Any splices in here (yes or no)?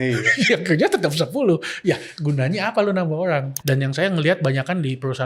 yes